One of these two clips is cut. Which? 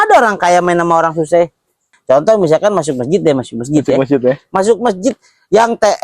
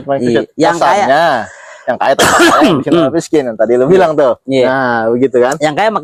first; 1 cut; at 1.9 s

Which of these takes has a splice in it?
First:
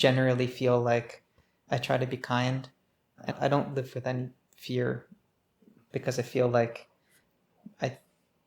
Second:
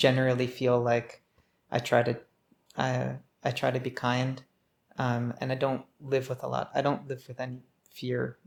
first; 3 cuts; at 1.5 s, 3.3 s, 5.8 s

